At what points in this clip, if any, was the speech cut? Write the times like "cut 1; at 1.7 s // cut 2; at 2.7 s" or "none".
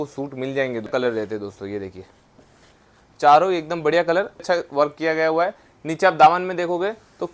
cut 1; at 0.9 s // cut 2; at 4.4 s